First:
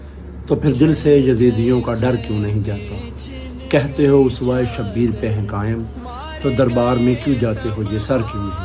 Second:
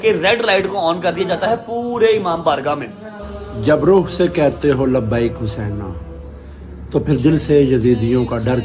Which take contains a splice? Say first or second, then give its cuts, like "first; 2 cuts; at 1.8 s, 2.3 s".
second; 1 cut; at 3.2 s